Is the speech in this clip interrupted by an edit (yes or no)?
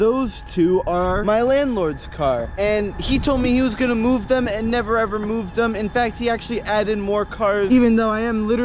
no